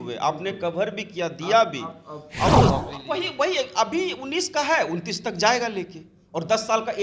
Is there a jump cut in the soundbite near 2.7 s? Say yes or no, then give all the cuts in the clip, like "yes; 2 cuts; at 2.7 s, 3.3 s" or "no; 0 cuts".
yes; 1 cut; at 2.7 s